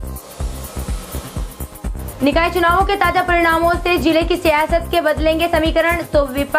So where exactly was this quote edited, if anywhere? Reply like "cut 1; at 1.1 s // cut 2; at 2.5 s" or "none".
cut 1; at 1.9 s